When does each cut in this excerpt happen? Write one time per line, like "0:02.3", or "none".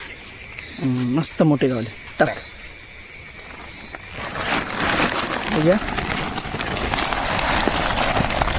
none